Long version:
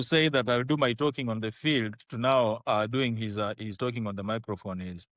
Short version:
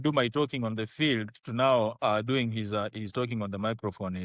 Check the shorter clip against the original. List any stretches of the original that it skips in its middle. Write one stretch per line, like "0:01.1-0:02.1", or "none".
none